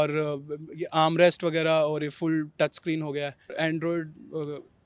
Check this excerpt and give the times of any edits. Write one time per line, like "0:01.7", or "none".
0:03.5